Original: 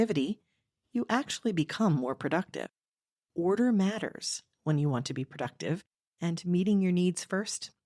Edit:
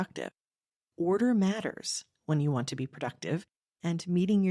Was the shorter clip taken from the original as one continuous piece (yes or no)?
yes